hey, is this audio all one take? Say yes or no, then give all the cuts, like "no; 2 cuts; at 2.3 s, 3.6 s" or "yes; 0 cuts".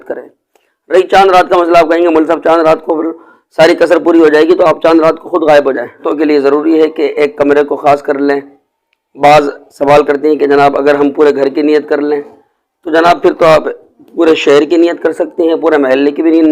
no; 1 cut; at 6.0 s